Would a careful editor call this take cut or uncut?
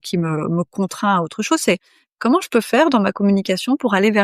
uncut